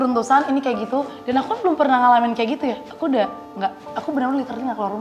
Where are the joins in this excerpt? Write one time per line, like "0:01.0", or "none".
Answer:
none

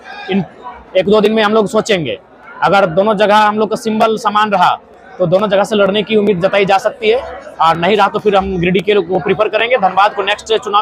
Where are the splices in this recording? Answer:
none

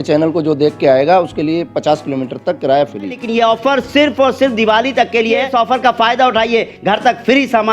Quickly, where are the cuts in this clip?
0:03.2
0:05.5

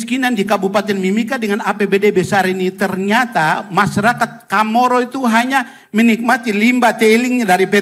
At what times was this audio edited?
none

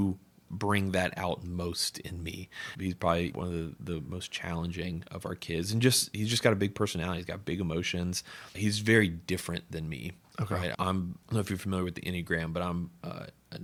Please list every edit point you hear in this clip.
none

